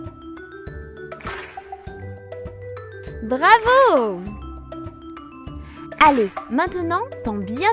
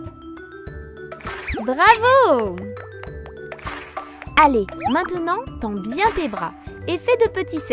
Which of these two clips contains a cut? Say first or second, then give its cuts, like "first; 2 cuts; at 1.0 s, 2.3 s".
first; 2 cuts; at 1.5 s, 3.2 s